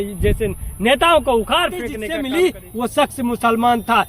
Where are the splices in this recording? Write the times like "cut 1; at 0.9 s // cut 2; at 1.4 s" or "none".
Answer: cut 1; at 2.0 s